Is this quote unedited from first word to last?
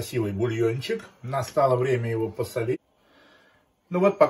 no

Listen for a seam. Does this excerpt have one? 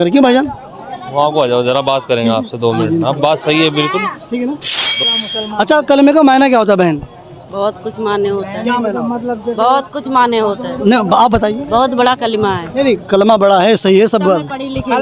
yes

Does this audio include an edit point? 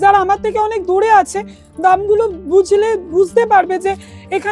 no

